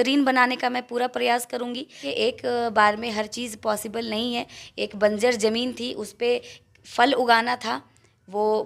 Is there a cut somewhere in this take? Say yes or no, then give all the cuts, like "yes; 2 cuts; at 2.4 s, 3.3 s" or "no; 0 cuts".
yes; 1 cut; at 2.0 s